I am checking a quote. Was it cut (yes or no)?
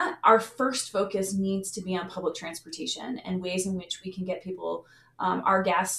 no